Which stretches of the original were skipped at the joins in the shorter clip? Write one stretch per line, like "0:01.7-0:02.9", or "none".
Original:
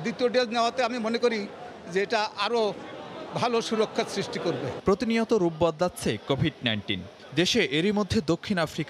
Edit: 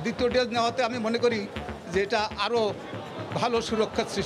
none